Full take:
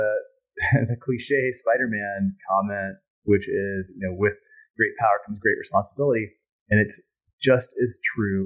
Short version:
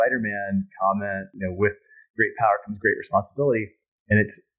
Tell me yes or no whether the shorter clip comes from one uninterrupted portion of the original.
no